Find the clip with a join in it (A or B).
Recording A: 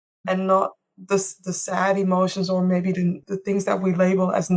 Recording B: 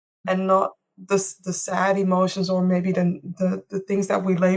A